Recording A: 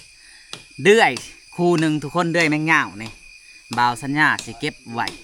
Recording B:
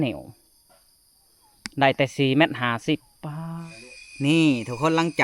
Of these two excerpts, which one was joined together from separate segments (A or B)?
B